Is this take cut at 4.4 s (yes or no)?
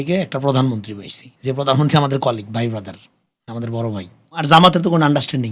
yes